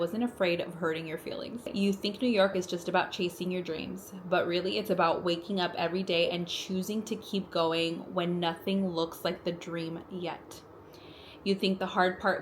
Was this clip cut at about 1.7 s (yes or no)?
yes